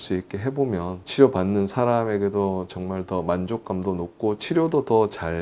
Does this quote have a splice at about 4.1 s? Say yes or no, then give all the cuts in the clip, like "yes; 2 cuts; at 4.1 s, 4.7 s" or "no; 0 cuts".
no; 0 cuts